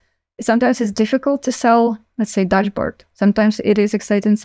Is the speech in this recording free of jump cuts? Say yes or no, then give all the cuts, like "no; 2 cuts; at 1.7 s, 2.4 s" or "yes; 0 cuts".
yes; 0 cuts